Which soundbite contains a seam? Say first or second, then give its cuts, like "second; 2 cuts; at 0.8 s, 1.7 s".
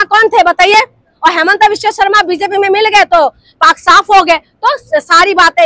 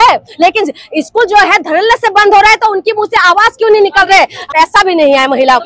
second; 1 cut; at 4.4 s